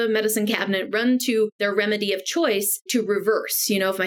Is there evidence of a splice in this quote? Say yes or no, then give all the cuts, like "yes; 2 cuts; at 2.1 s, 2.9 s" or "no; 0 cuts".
yes; 2 cuts; at 1.5 s, 2.9 s